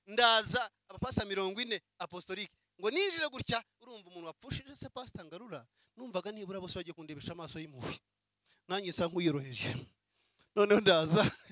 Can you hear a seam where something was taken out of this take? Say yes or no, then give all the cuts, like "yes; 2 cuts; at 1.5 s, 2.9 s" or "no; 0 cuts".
no; 0 cuts